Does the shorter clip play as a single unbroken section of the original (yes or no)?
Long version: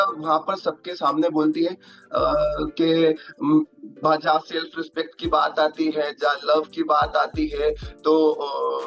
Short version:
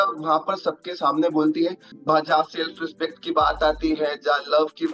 no